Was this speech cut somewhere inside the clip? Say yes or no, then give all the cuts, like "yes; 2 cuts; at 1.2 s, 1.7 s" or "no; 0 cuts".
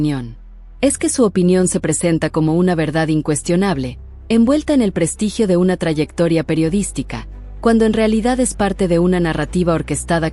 no; 0 cuts